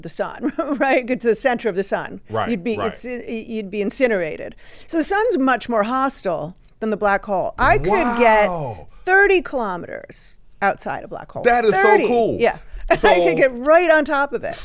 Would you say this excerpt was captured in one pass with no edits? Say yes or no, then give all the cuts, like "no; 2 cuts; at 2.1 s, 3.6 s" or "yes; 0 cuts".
yes; 0 cuts